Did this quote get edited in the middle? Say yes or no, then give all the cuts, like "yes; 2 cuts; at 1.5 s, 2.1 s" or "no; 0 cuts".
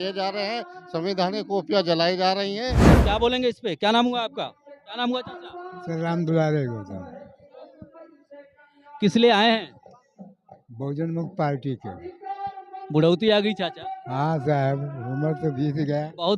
yes; 1 cut; at 2.8 s